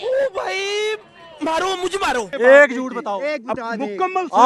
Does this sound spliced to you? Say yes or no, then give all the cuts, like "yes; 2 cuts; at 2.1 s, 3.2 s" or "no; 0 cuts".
yes; 1 cut; at 2.3 s